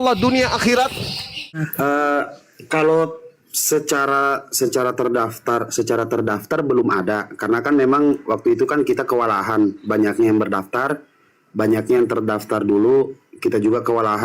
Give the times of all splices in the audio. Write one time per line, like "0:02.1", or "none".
0:01.6